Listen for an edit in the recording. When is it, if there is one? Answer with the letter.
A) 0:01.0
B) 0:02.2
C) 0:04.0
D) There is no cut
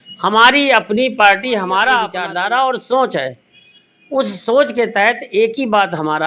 B